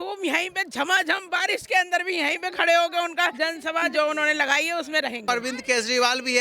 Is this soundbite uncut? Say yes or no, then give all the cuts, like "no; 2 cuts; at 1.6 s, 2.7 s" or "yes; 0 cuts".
no; 2 cuts; at 3.3 s, 5.2 s